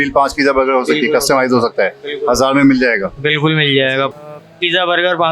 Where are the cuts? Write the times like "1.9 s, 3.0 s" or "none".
4.1 s